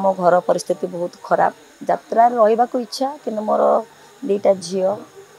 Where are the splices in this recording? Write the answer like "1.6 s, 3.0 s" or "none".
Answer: 1.7 s